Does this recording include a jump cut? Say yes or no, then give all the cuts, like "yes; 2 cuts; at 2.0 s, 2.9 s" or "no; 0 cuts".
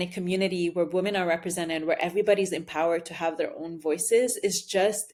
no; 0 cuts